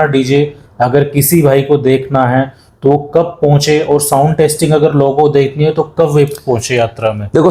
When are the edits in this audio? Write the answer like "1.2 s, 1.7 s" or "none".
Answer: none

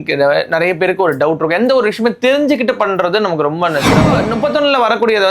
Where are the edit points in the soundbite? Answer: 4.1 s

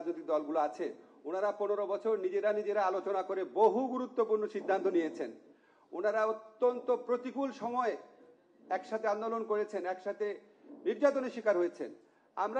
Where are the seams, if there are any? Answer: none

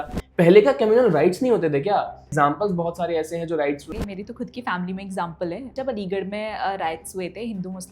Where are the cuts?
2.3 s, 3.9 s, 5.7 s

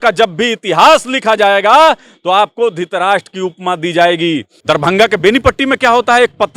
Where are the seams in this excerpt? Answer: 4.5 s

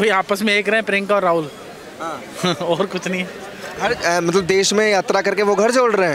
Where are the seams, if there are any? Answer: none

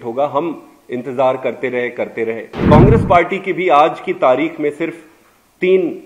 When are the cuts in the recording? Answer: 2.5 s

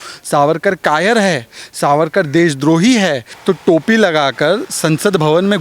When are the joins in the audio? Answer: 3.3 s

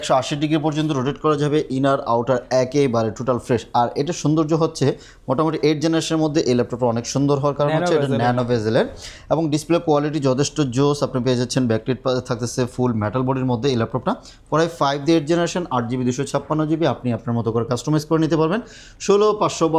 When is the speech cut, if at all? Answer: none

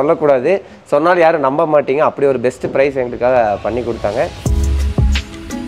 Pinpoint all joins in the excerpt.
4.4 s

